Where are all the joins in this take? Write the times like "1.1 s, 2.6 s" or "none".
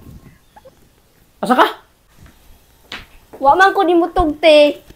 2.2 s